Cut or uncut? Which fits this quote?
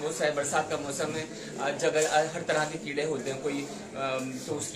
uncut